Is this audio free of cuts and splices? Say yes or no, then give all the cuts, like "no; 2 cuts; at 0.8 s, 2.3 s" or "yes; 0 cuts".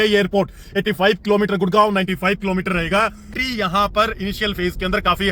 no; 1 cut; at 3.3 s